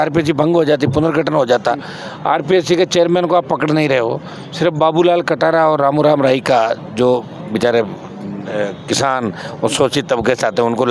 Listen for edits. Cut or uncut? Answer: uncut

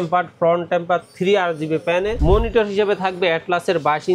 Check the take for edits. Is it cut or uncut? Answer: cut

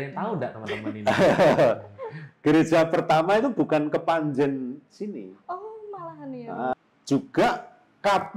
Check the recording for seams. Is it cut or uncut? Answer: cut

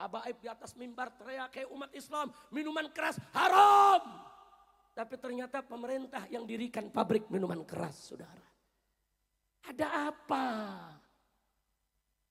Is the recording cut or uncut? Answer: uncut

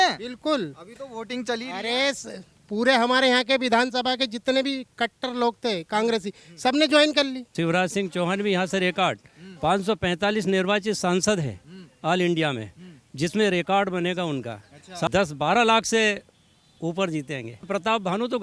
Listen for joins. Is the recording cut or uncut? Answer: cut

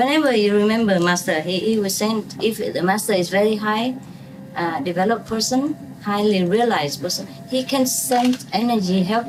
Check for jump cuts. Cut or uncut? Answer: uncut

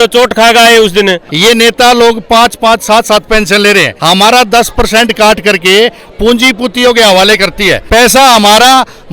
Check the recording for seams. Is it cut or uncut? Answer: cut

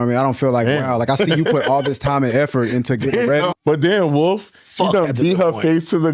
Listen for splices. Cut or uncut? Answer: cut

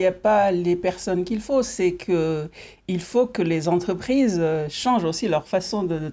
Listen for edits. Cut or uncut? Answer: uncut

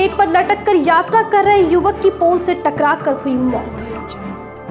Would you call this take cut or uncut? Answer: uncut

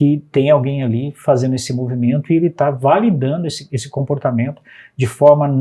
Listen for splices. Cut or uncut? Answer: uncut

